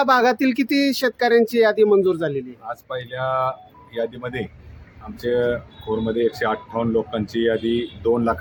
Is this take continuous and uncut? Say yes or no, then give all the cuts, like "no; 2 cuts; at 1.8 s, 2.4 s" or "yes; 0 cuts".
yes; 0 cuts